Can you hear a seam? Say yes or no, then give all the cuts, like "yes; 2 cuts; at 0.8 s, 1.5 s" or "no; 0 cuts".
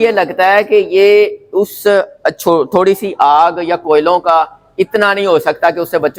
no; 0 cuts